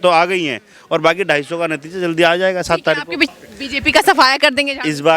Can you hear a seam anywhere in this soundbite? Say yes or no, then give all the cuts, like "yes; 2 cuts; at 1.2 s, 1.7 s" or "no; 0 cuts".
yes; 1 cut; at 3.3 s